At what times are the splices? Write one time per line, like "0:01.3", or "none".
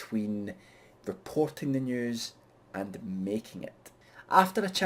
0:01.4